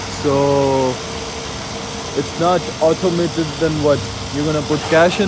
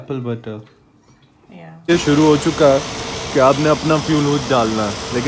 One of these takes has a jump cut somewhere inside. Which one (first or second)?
second